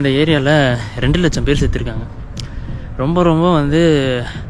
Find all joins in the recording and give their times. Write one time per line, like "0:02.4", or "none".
none